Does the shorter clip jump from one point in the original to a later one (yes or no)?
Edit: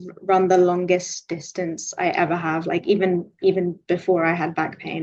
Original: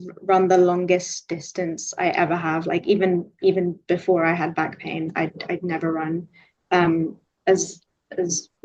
no